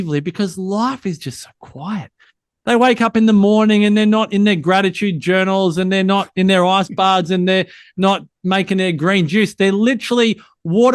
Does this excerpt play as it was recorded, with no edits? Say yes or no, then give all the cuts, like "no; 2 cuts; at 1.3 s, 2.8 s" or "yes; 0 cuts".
yes; 0 cuts